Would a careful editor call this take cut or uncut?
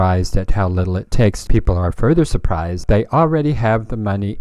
cut